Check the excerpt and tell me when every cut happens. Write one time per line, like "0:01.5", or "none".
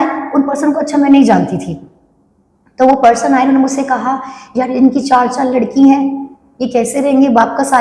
none